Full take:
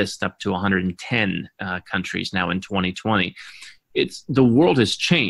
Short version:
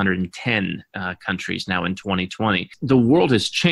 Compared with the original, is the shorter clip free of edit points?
no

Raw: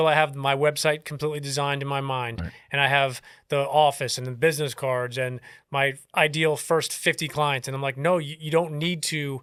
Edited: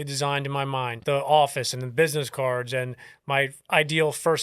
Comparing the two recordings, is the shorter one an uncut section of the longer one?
no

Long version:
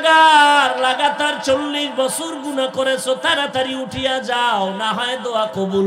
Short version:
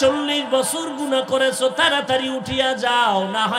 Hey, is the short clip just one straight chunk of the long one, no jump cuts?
yes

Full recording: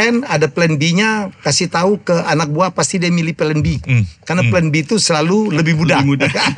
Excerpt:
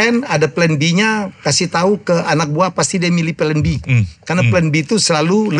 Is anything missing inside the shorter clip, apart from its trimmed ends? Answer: no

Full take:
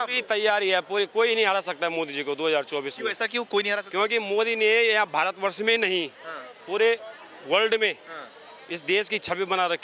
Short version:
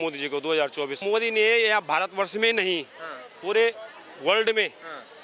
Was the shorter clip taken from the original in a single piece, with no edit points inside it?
no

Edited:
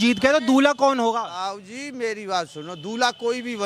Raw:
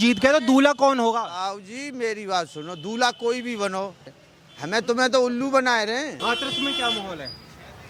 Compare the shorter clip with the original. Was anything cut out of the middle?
no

